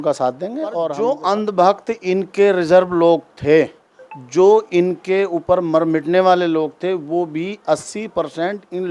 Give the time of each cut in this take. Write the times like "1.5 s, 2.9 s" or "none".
0.9 s